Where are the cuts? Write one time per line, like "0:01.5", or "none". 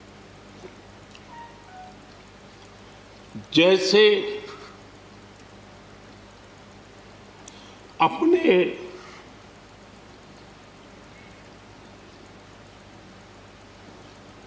0:01.3